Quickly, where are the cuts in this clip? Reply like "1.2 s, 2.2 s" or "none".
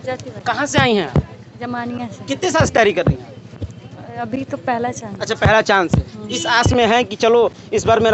none